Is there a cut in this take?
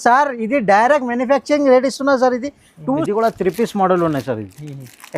yes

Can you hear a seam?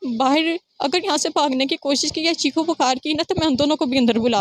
no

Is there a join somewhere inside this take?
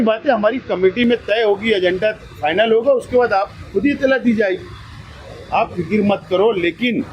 no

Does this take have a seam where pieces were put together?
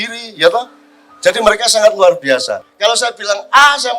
yes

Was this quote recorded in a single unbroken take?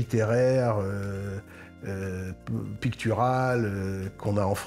yes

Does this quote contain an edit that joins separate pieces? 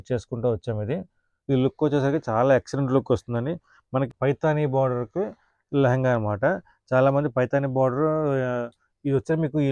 yes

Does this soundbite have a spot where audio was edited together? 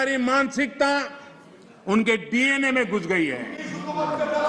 no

